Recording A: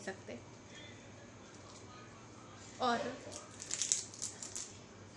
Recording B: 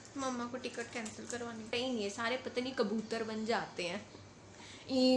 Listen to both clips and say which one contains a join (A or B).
B